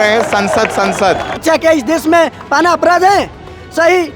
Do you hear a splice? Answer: yes; 1 cut; at 1.3 s

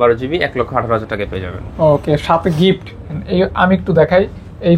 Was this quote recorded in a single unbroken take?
no; 1 cut; at 3.1 s

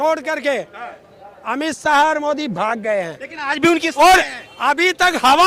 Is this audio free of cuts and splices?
yes; 0 cuts

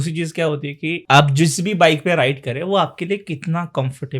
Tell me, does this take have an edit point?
yes; 1 cut; at 0.9 s

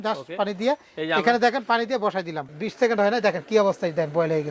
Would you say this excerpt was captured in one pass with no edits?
no; 1 cut; at 2.5 s

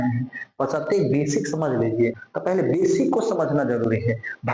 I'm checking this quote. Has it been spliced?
yes; 1 cut; at 2.3 s

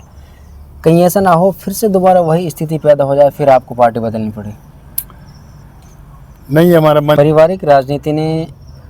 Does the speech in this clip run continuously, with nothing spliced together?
no; 1 cut; at 7.2 s

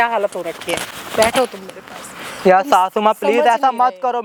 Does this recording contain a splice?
no; 0 cuts

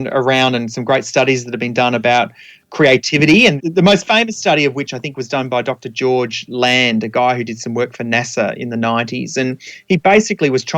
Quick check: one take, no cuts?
no; 1 cut; at 3.6 s

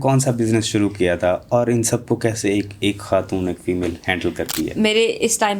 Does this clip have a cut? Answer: no; 0 cuts

